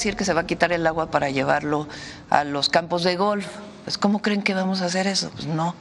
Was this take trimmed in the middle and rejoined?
no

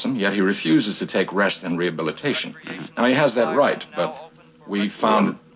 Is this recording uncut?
no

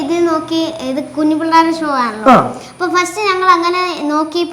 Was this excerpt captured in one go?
yes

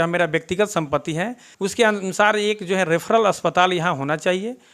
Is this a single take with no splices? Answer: no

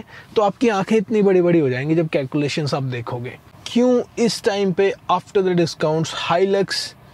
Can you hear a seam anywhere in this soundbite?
yes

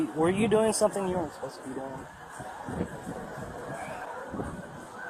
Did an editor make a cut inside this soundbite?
no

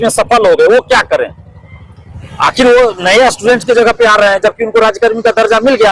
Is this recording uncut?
yes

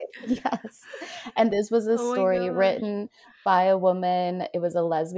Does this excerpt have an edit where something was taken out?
no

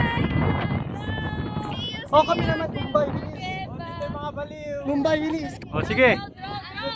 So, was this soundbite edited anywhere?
yes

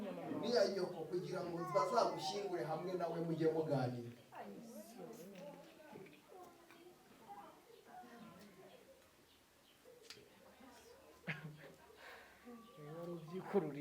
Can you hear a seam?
no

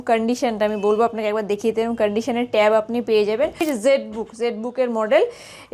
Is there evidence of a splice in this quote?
yes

